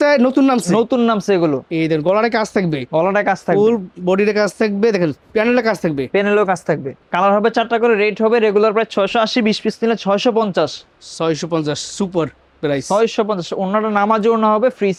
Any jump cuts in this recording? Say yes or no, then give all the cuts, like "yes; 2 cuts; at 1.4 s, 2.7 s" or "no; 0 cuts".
no; 0 cuts